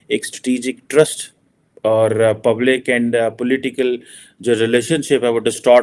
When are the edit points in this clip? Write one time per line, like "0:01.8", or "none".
none